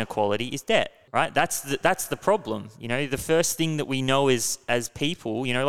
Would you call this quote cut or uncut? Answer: cut